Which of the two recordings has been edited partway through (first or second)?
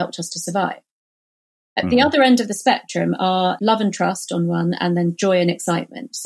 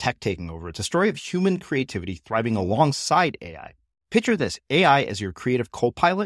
first